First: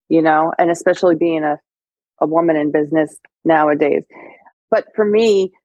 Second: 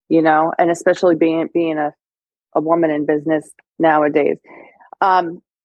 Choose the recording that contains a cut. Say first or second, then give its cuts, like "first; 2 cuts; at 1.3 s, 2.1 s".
first; 2 cuts; at 1.2 s, 4.6 s